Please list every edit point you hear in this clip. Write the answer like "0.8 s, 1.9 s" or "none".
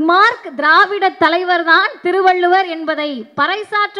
none